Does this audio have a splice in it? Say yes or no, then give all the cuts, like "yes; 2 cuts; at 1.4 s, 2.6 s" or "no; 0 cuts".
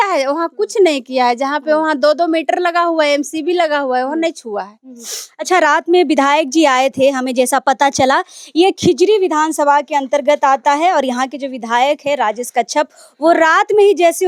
no; 0 cuts